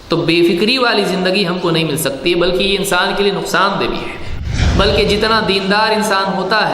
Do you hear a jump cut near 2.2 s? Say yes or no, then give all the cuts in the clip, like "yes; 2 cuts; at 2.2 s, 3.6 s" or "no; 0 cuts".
no; 1 cut; at 4.6 s